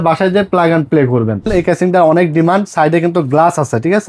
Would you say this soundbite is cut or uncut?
cut